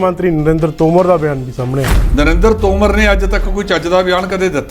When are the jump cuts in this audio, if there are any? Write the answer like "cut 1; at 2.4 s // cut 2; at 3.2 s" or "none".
cut 1; at 2.0 s